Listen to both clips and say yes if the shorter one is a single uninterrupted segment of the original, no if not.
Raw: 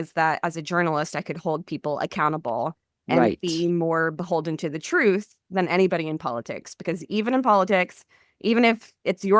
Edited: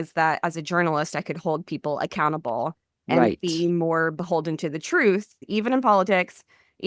no